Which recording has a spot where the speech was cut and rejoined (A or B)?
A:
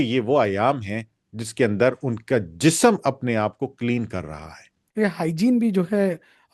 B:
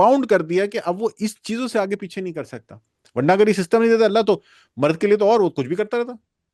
A